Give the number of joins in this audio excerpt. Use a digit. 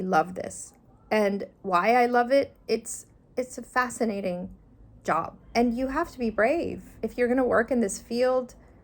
2